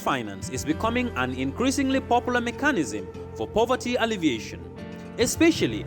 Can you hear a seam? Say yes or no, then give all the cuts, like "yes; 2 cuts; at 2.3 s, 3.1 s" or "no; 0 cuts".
no; 0 cuts